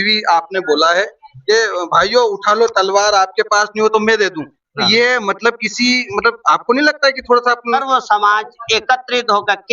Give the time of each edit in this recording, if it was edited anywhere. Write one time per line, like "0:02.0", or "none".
0:07.7